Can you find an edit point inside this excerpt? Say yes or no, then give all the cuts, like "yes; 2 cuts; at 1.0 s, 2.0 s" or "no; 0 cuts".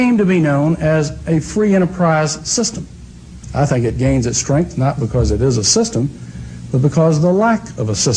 no; 0 cuts